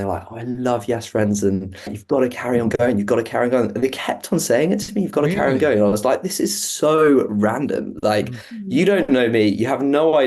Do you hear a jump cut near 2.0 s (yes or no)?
yes